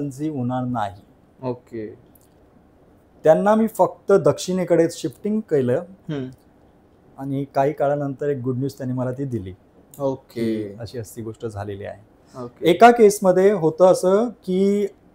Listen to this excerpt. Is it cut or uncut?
uncut